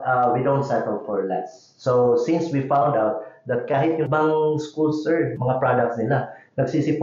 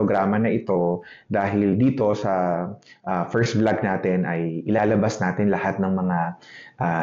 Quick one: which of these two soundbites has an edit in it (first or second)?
first